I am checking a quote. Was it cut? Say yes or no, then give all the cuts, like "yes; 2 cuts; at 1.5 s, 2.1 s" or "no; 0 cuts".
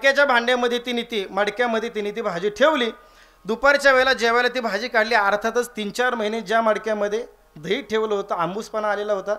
no; 0 cuts